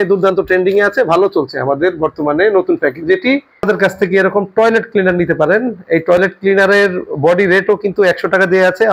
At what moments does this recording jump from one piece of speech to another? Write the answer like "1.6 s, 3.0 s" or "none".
3.6 s